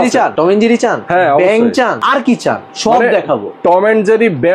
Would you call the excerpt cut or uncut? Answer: uncut